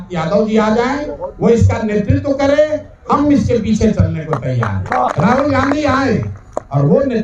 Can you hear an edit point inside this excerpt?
yes; 1 cut; at 5.1 s

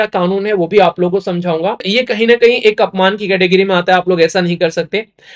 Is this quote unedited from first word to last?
no; 1 cut; at 1.9 s

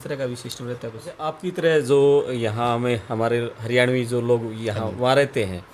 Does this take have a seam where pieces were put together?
yes; 1 cut; at 1.4 s

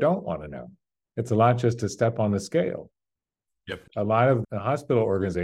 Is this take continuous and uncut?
no; 2 cuts; at 3.7 s, 4.4 s

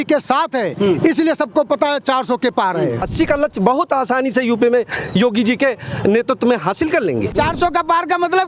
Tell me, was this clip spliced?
yes; 2 cuts; at 3.1 s, 7.3 s

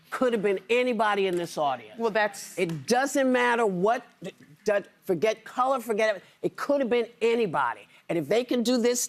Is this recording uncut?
yes; 0 cuts

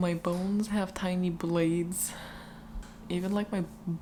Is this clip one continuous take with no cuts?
yes; 0 cuts

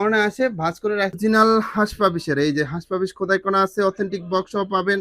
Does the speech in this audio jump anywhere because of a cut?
yes; 1 cut; at 1.1 s

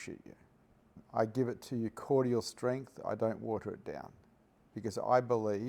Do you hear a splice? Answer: yes; 1 cut; at 1.0 s

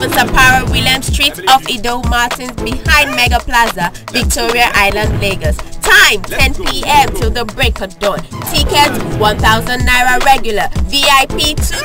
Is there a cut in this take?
no; 0 cuts

